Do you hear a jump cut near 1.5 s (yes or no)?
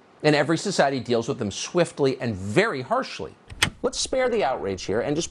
no